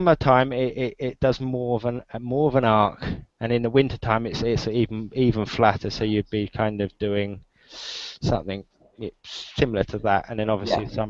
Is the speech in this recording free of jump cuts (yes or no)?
yes